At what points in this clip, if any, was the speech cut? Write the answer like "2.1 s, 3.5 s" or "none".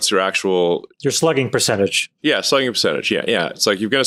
none

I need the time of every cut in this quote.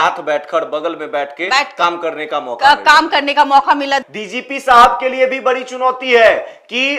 4.2 s

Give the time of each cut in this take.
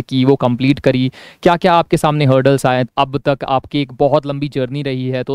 2.9 s

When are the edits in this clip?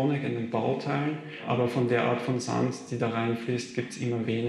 1.4 s

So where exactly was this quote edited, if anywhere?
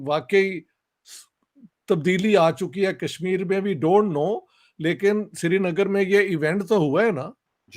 none

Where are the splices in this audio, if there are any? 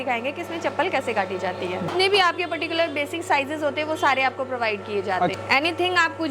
1.9 s, 5.3 s

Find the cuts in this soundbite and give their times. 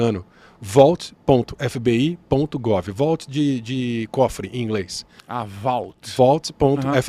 none

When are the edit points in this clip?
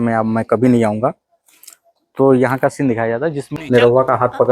3.6 s

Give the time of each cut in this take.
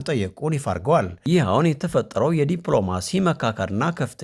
1.1 s

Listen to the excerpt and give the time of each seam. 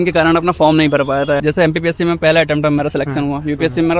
1.4 s

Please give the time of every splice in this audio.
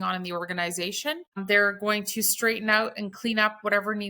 1.4 s

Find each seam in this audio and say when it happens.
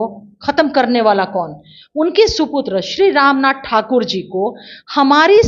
none

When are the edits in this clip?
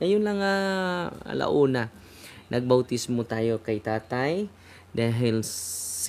none

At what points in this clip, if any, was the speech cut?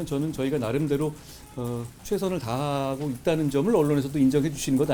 none

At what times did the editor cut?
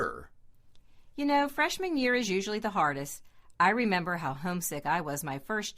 4.7 s

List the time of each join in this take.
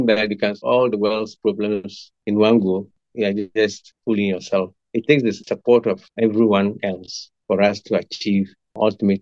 none

